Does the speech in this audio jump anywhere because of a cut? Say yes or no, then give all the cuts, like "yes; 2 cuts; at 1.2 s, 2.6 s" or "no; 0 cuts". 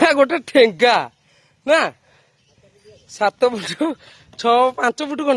no; 0 cuts